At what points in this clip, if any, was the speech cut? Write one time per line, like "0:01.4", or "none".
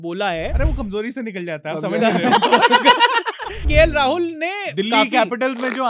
0:03.5